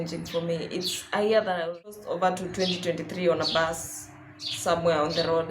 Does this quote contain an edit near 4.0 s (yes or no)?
no